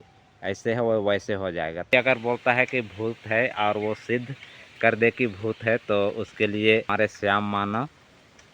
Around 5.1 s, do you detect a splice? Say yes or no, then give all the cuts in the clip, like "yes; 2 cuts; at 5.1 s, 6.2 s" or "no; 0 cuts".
no; 2 cuts; at 1.9 s, 6.9 s